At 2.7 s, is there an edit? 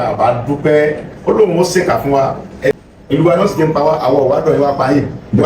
yes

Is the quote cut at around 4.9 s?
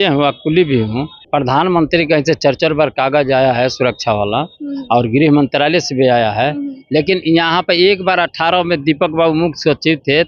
no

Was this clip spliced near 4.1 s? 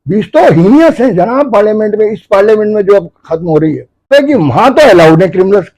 yes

